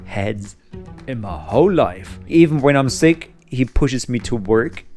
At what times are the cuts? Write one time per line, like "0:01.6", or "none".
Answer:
0:02.2